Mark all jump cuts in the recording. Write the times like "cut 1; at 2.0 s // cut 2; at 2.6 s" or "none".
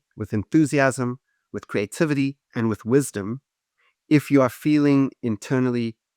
cut 1; at 2.4 s